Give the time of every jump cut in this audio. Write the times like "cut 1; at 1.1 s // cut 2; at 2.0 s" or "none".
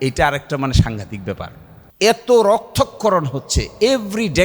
cut 1; at 1.8 s